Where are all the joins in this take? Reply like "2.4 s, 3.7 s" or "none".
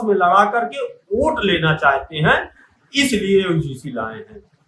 none